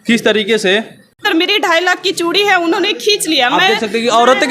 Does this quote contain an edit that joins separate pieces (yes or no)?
yes